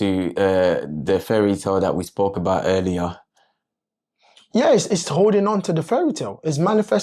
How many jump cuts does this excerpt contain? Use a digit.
0